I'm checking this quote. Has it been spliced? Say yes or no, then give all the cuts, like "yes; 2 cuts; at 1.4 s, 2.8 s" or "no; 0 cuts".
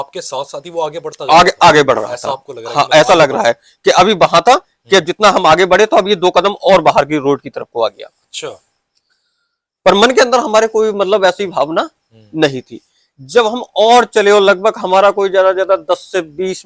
no; 0 cuts